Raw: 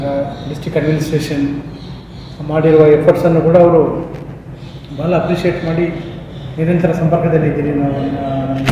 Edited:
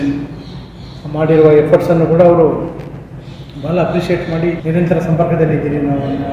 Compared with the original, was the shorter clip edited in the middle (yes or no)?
yes